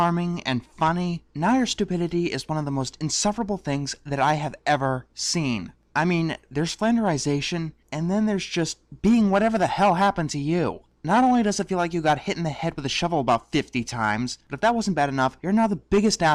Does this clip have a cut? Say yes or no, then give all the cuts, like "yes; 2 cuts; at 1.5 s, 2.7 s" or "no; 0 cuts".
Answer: no; 0 cuts